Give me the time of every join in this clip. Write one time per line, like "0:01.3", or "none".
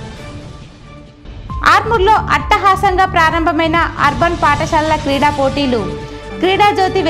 0:01.3

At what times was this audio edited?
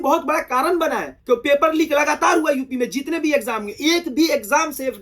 0:01.1

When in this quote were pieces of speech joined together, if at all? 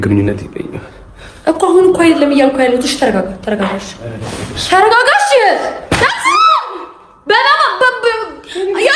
none

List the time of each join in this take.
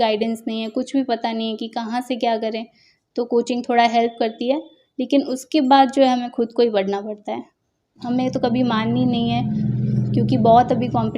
0:08.0

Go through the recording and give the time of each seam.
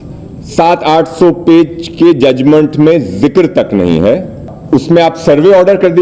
0:04.5

